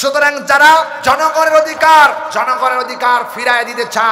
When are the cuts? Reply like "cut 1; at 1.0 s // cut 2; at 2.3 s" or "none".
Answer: cut 1; at 0.9 s // cut 2; at 2.3 s